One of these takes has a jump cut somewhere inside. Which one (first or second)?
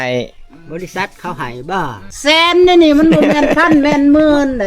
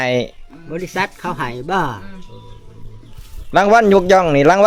first